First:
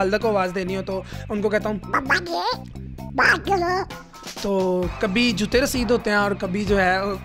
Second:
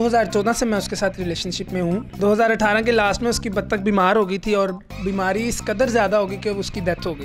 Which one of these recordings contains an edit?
second; 1 cut; at 2.1 s

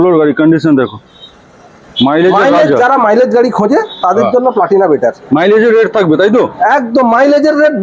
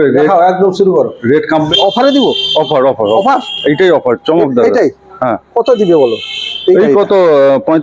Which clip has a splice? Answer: second; 1 cut; at 1.7 s

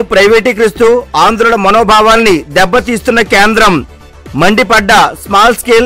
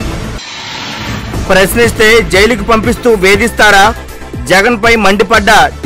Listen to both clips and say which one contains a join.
second; 1 cut; at 0.9 s

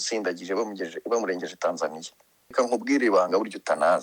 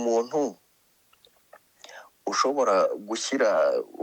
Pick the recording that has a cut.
first; 1 cut; at 2.5 s

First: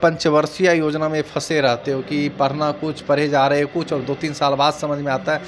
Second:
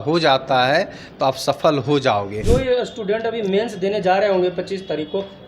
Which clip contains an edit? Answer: second; 1 cut; at 2.3 s

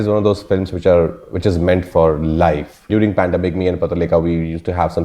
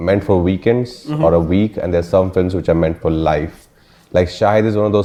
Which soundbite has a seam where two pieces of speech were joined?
first; 1 cut; at 2.9 s

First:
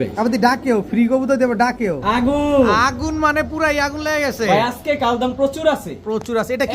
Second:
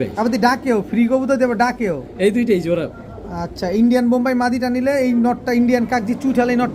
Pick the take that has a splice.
first; 1 cut; at 2.0 s

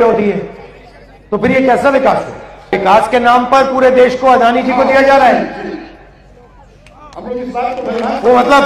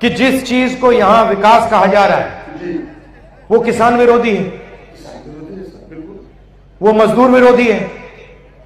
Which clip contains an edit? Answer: first; 1 cut; at 2.7 s

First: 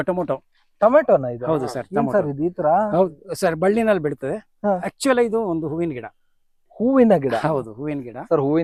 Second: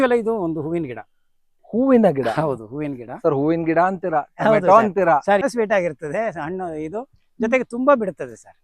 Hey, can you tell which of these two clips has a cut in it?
second; 1 cut; at 5.4 s

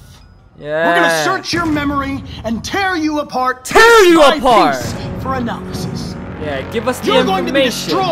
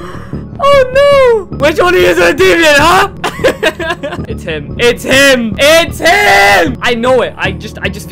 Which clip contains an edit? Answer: second; 5 cuts; at 1.5 s, 3.2 s, 4.3 s, 5.5 s, 6.8 s

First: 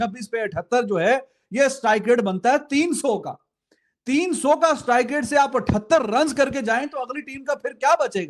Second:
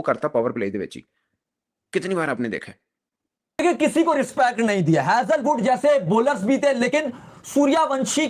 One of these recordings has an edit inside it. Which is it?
second; 1 cut; at 3.6 s

